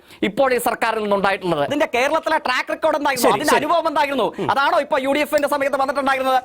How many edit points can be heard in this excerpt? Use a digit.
1